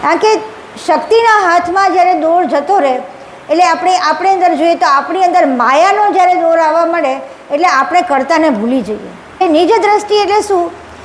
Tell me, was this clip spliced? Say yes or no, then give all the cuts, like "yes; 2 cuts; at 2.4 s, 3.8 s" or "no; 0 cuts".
yes; 1 cut; at 9.4 s